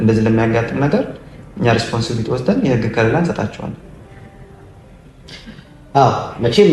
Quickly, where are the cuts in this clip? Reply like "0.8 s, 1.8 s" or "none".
none